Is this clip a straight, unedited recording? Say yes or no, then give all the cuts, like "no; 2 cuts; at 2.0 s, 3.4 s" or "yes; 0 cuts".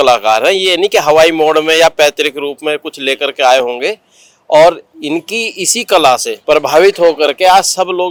yes; 0 cuts